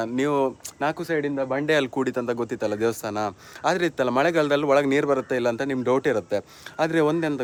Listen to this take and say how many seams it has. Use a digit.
0